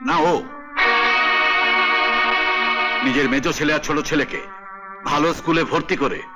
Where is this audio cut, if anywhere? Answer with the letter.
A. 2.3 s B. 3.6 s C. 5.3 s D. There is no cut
D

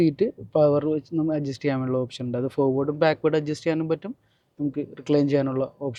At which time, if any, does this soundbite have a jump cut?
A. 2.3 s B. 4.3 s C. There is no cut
C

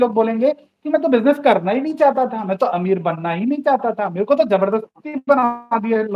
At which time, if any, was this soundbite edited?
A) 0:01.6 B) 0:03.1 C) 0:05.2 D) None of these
D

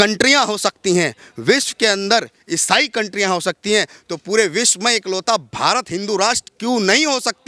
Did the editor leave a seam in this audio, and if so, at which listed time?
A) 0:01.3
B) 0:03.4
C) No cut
C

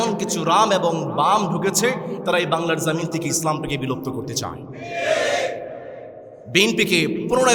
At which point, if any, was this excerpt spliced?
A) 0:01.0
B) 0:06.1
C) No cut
C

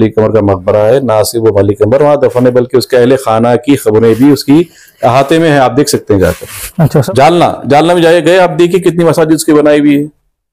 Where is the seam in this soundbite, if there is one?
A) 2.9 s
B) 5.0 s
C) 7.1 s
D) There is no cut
C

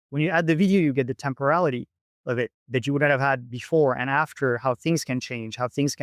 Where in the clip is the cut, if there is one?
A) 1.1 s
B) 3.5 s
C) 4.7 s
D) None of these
B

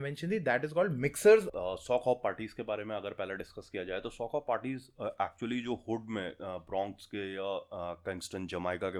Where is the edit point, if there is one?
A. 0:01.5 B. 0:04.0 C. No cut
A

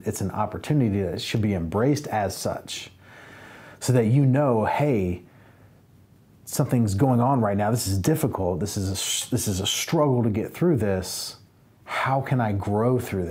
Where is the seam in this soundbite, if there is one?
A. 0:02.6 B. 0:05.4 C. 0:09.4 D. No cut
D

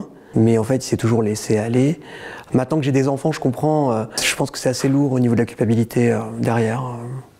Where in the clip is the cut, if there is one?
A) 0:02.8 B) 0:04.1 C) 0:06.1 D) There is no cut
B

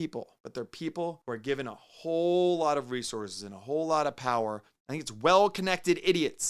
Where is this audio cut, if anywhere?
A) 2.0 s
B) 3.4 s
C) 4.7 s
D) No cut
C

